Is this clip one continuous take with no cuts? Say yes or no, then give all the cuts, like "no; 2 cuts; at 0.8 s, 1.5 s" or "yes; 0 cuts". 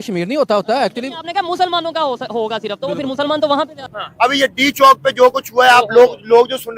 no; 1 cut; at 4.0 s